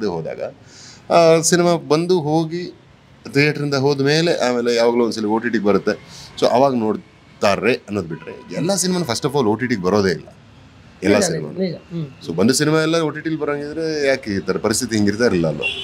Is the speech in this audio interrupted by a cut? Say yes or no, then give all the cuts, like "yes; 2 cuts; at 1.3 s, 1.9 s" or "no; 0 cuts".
no; 0 cuts